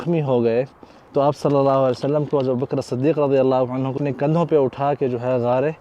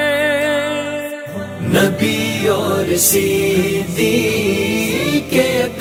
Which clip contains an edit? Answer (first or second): first